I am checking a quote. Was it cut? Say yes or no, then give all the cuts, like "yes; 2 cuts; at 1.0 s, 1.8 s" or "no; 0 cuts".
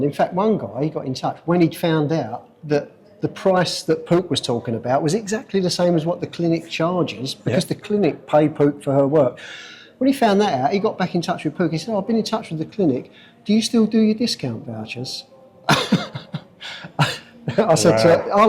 no; 0 cuts